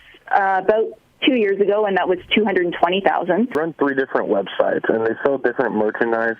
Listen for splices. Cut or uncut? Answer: cut